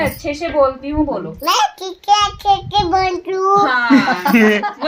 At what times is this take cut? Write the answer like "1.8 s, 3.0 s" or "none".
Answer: none